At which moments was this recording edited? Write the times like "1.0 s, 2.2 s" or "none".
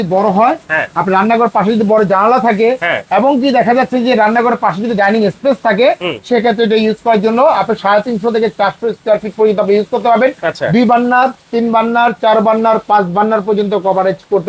none